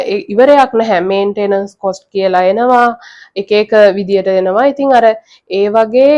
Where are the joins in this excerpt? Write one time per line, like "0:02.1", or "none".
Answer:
none